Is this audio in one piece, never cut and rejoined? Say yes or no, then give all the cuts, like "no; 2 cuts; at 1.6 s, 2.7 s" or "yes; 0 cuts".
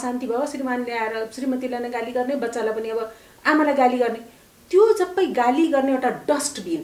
yes; 0 cuts